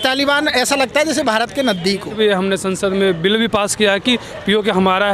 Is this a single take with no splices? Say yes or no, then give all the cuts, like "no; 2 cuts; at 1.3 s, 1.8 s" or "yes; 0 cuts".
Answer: no; 1 cut; at 2.2 s